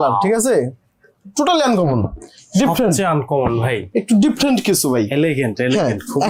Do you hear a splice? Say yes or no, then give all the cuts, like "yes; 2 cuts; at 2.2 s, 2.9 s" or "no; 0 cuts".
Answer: no; 0 cuts